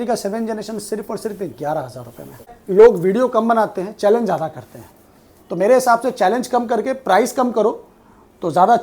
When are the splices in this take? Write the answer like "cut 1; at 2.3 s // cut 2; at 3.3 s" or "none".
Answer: cut 1; at 2.6 s